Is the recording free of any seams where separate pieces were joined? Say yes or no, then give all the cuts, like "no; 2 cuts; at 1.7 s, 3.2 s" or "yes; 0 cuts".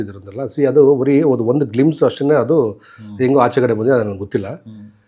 yes; 0 cuts